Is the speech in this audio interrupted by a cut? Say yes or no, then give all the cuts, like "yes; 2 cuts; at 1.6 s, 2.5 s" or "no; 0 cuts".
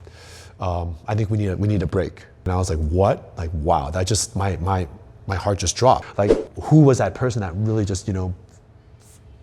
yes; 2 cuts; at 2.4 s, 6.1 s